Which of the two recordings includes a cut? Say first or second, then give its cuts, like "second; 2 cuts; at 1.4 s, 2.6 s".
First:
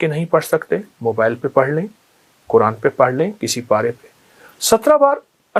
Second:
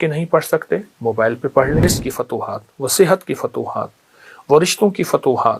second; 1 cut; at 1.8 s